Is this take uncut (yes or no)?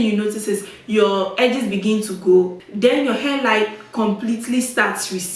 no